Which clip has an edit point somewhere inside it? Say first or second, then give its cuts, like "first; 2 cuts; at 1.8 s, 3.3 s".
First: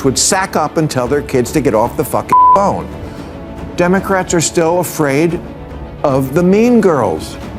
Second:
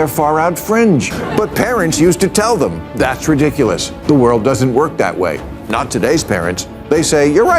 second; 1 cut; at 1.2 s